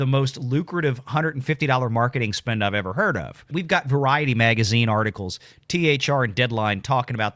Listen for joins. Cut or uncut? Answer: cut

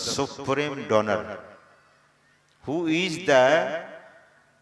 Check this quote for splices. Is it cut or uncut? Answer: uncut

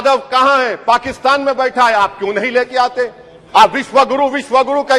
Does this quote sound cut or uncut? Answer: uncut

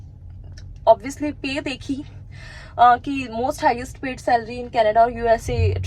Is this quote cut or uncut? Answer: uncut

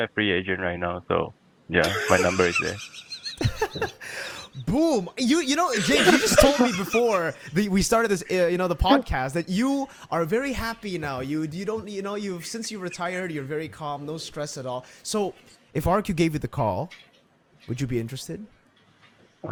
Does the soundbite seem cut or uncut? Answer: uncut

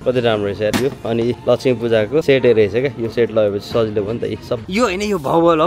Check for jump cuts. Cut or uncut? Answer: cut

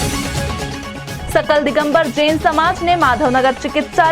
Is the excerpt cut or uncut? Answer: cut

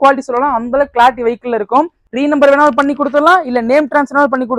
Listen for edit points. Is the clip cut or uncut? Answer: cut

